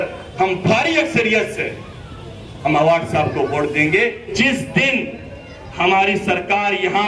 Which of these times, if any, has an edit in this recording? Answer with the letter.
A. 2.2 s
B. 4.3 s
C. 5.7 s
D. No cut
B